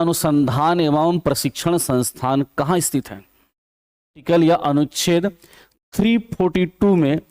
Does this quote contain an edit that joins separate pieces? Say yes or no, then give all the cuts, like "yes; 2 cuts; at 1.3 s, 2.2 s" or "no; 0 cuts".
yes; 1 cut; at 4.2 s